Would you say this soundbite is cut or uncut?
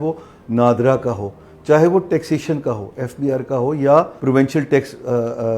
cut